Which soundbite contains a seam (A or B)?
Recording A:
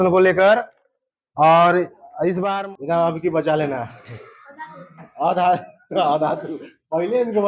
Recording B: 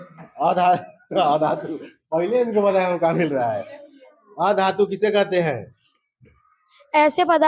A